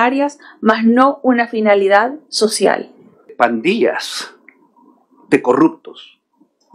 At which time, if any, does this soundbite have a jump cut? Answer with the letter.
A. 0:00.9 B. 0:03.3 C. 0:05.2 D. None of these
B